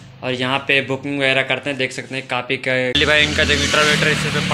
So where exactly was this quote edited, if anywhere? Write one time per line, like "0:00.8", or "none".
0:03.0

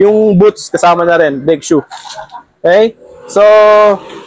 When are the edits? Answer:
none

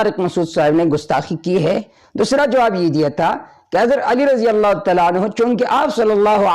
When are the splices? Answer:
0:02.0

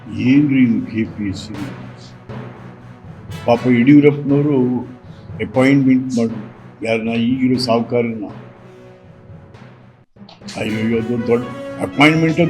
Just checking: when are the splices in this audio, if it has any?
0:08.5
0:10.5

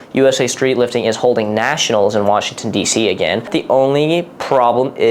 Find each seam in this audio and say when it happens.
0:03.5

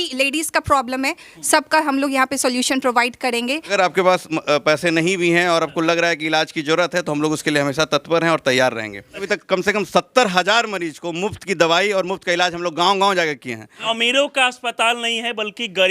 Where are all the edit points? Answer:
0:03.7
0:09.2
0:13.9

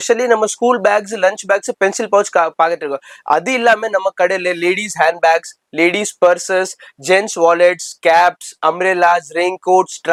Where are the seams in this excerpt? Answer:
none

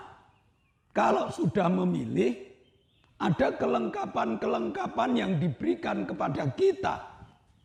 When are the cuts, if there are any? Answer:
none

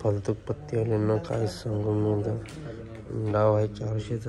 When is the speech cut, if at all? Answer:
none

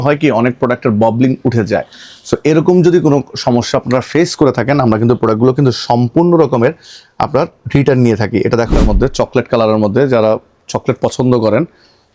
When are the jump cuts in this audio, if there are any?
0:08.7

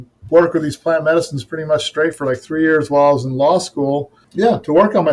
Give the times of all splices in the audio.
0:04.2

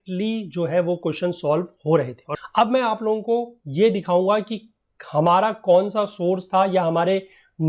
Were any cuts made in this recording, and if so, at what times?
0:02.2

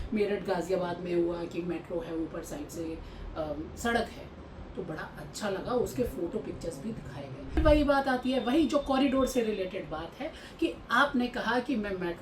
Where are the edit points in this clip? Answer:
0:07.6

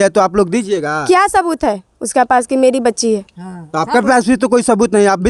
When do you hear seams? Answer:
none

